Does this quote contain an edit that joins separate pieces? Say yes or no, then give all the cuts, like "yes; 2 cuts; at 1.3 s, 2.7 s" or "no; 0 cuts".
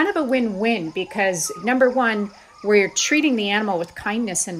yes; 1 cut; at 1.5 s